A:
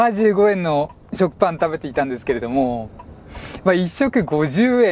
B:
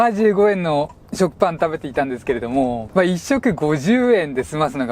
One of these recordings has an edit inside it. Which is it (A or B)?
B